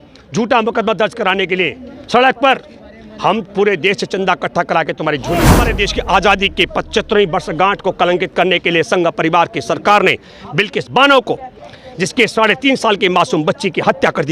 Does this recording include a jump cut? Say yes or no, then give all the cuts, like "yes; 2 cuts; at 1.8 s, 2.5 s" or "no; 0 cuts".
yes; 1 cut; at 5.7 s